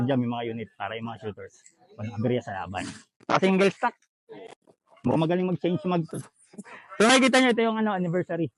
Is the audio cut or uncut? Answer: cut